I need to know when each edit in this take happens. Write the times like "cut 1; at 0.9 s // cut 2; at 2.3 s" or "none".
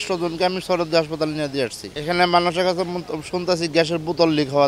none